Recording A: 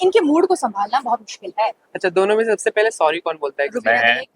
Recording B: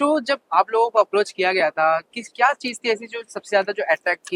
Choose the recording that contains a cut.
A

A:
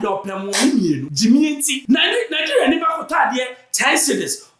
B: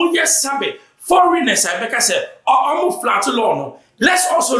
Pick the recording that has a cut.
A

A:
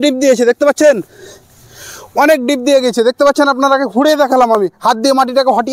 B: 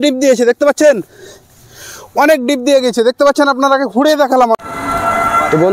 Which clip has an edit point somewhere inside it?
B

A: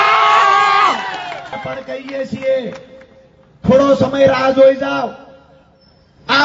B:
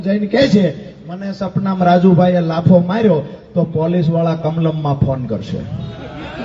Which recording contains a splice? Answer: A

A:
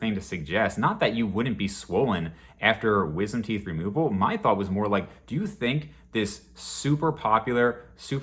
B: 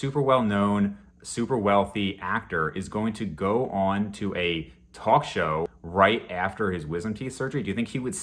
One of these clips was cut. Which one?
B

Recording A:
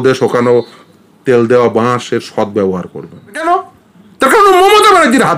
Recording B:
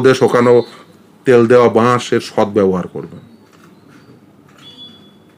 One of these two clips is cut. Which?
A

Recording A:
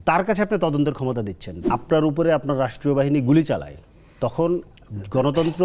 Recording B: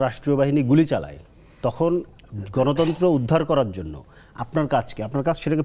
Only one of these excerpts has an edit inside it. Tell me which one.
A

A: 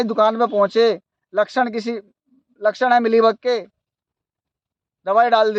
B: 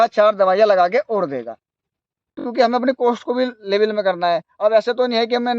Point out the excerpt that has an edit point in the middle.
B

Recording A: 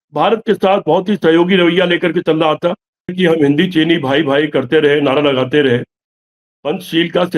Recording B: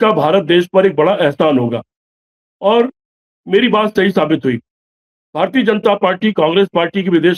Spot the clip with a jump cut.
A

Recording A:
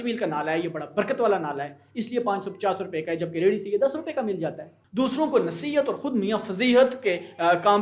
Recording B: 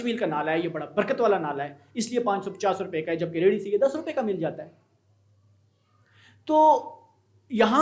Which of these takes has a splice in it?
A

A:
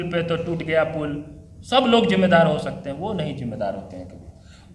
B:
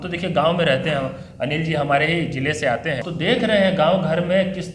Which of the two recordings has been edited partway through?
B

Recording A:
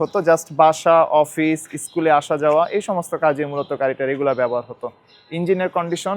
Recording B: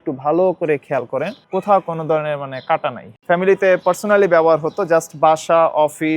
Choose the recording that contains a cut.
B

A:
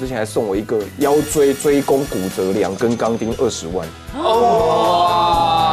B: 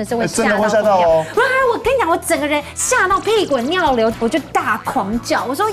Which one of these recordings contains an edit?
B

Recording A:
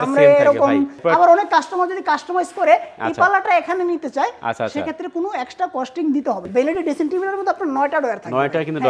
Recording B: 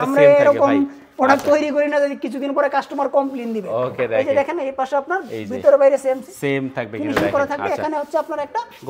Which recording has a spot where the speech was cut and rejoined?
A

